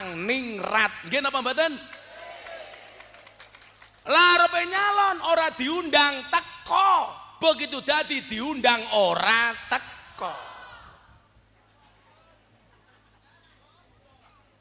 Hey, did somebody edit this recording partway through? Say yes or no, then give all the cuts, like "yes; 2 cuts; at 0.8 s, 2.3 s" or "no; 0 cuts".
no; 0 cuts